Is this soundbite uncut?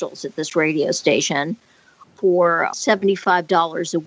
no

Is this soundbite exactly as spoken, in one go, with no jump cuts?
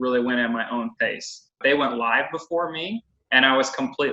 no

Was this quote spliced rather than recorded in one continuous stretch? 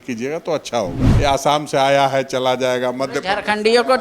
yes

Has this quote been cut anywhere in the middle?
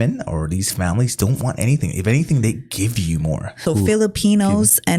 yes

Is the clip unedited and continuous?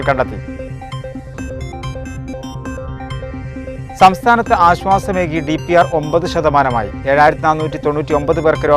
yes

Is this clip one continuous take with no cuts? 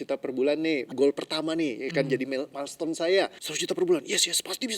no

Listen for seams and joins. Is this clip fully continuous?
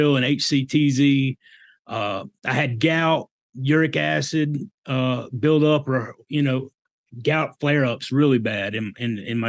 yes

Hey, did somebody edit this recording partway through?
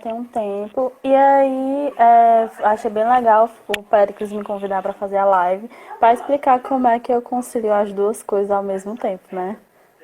yes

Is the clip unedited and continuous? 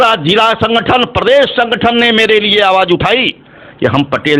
yes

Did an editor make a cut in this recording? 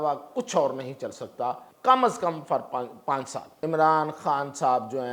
yes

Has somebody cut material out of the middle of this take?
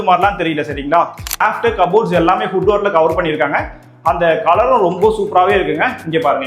yes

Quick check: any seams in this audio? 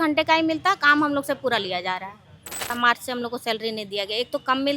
yes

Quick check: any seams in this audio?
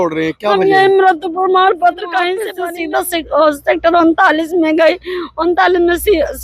yes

